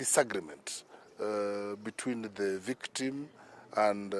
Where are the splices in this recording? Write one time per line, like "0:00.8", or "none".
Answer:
none